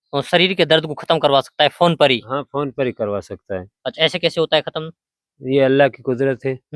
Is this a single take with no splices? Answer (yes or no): yes